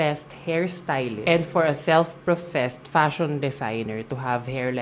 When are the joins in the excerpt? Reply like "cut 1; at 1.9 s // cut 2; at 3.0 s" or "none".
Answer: cut 1; at 1.2 s